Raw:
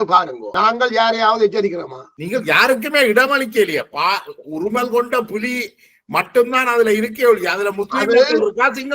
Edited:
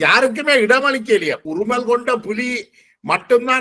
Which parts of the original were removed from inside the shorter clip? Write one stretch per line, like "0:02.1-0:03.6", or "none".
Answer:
0:03.9-0:04.5